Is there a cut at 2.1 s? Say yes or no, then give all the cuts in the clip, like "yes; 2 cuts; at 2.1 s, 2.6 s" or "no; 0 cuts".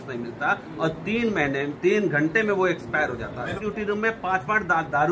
no; 1 cut; at 3.6 s